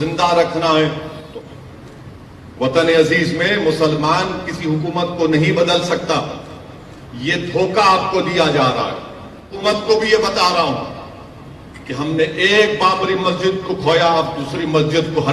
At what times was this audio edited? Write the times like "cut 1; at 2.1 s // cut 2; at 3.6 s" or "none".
cut 1; at 1.3 s // cut 2; at 9.5 s